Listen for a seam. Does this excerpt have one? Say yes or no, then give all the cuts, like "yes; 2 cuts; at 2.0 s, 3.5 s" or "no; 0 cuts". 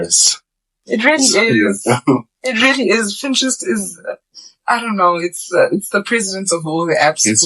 no; 0 cuts